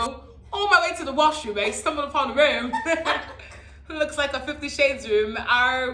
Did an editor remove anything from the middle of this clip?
no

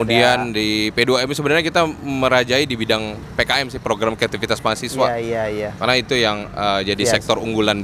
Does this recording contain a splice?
no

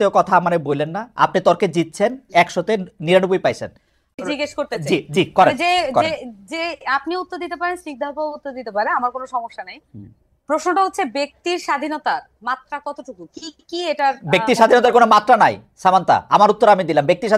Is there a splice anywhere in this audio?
yes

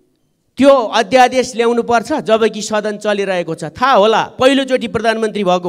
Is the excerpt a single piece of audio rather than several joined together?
yes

